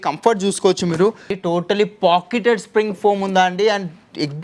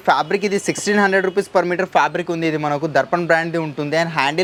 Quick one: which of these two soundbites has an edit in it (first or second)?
first